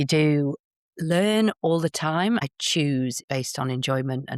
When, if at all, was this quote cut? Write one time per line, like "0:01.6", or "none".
0:02.6
0:03.2